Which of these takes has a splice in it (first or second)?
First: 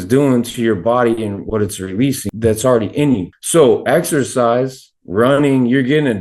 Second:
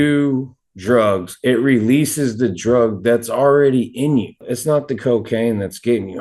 first